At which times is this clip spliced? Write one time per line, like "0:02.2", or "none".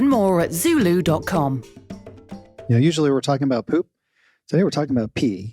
0:02.6